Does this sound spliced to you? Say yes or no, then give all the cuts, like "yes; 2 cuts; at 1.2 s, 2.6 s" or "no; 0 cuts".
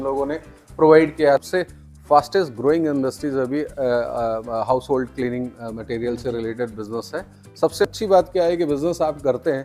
yes; 2 cuts; at 1.4 s, 7.9 s